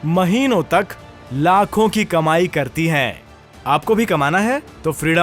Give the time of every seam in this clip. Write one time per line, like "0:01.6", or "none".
none